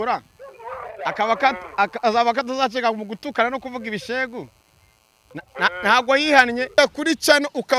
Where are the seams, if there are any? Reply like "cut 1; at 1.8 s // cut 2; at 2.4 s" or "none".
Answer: cut 1; at 6.7 s